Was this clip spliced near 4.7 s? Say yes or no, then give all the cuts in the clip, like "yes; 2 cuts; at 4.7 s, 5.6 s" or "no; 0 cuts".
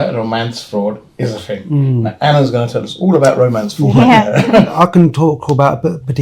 yes; 1 cut; at 4.7 s